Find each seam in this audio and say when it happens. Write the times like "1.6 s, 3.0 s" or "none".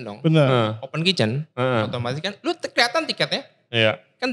none